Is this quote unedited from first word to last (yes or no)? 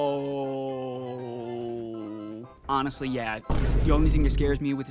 no